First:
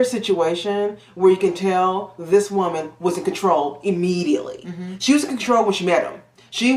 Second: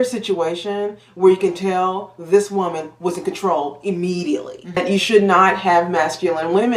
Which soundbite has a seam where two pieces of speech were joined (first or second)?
second